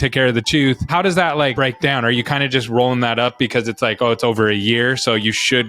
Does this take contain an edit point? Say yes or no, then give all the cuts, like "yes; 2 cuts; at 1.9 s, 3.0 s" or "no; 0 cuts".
yes; 2 cuts; at 0.9 s, 1.5 s